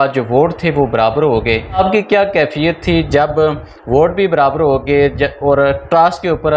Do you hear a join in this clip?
yes; 1 cut; at 1.8 s

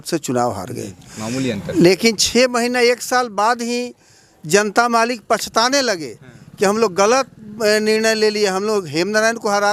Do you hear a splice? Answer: no; 0 cuts

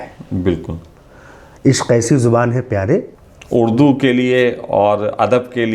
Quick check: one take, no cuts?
no; 1 cut; at 3.1 s

